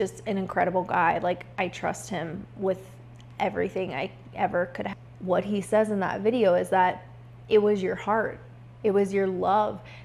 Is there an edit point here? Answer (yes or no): yes